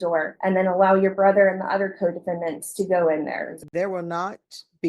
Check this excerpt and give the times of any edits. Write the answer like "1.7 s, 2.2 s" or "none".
3.6 s